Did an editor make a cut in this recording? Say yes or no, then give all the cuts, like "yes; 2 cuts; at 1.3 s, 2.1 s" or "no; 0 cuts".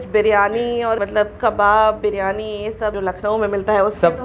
no; 0 cuts